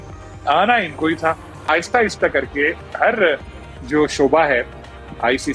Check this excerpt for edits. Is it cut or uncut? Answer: uncut